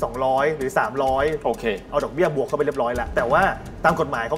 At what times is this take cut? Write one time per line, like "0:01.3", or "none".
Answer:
0:03.1

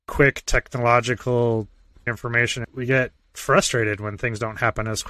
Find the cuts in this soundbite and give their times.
none

